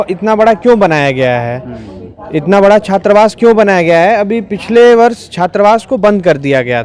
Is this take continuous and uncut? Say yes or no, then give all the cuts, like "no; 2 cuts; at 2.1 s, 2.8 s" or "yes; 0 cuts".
yes; 0 cuts